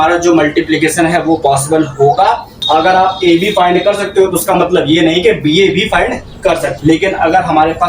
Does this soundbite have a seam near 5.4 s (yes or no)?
no